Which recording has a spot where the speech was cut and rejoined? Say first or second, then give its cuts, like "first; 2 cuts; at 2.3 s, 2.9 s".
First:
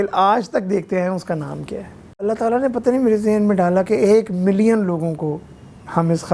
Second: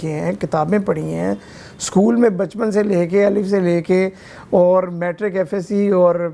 first; 1 cut; at 2.2 s